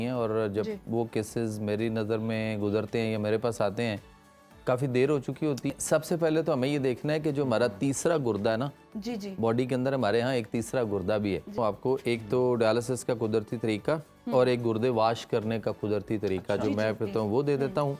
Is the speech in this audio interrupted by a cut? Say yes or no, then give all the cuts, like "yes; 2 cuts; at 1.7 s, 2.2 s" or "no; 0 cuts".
yes; 2 cuts; at 5.7 s, 11.6 s